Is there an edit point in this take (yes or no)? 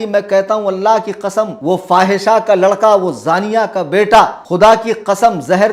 yes